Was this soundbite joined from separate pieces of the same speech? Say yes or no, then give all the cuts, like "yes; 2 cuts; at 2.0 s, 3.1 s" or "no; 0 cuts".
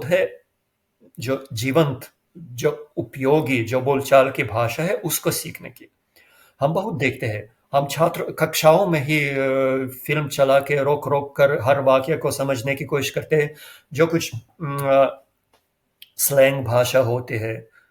no; 0 cuts